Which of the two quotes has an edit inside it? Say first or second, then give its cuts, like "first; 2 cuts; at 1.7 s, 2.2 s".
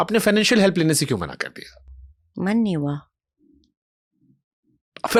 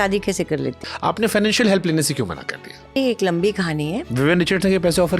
second; 3 cuts; at 0.9 s, 3.0 s, 4.1 s